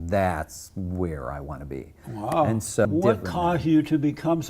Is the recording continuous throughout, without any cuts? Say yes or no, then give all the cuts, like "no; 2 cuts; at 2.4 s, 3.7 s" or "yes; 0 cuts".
no; 1 cut; at 2.9 s